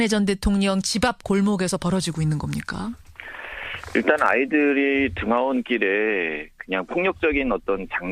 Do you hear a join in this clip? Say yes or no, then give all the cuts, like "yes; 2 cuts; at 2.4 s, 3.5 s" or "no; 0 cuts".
yes; 1 cut; at 3.6 s